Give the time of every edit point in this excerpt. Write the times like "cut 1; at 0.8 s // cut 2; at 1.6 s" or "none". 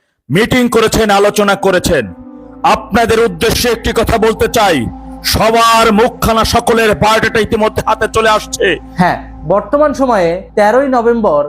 cut 1; at 8.8 s